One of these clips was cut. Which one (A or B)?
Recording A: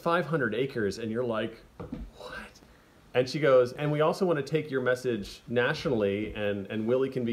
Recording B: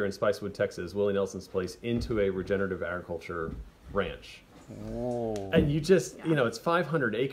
A